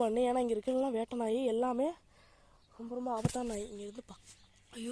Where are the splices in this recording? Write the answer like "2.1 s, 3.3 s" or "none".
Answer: none